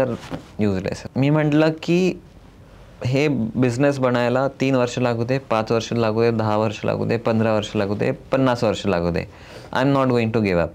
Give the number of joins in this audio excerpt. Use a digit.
1